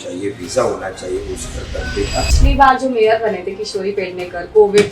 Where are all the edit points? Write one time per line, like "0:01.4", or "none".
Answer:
0:02.3

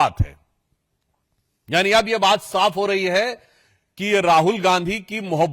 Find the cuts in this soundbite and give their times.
none

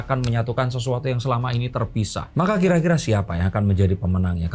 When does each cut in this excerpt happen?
0:02.3

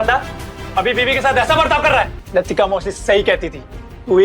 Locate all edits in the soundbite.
0:02.2

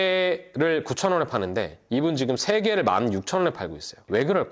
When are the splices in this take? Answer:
none

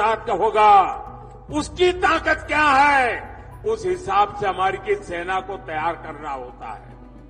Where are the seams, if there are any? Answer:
none

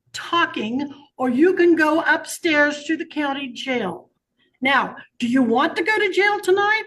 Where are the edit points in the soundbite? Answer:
none

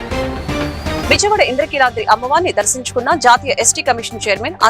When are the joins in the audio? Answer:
0:01.0

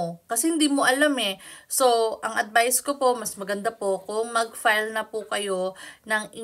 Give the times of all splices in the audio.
none

